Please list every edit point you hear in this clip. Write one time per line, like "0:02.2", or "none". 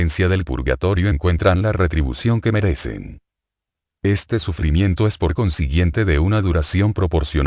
0:01.0